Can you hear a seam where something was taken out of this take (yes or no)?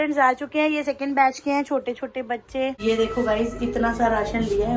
yes